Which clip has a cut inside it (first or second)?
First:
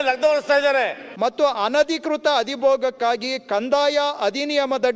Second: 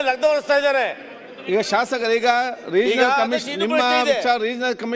first